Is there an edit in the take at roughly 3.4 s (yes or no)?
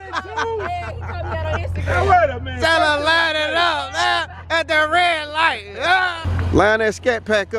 no